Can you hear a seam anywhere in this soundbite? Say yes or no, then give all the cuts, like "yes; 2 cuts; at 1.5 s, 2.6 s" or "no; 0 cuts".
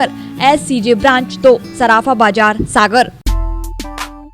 yes; 1 cut; at 3.2 s